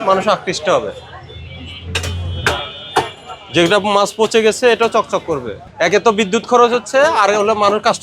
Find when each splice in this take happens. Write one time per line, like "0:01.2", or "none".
0:05.6